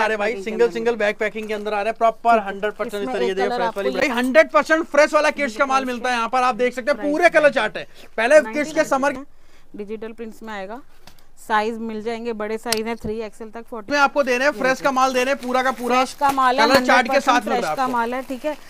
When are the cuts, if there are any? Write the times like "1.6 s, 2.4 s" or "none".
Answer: 4.0 s, 9.2 s, 13.9 s